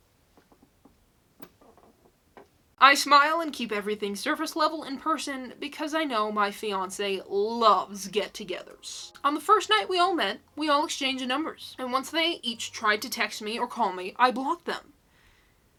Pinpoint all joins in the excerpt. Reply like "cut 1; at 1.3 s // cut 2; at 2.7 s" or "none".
none